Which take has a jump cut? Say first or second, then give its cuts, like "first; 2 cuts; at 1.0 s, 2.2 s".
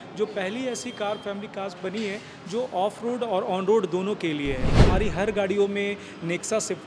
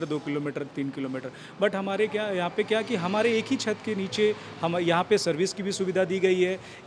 first; 1 cut; at 4.7 s